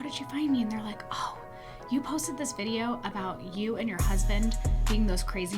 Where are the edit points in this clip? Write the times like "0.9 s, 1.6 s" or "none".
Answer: none